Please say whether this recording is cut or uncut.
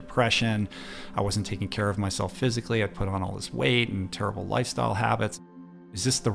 cut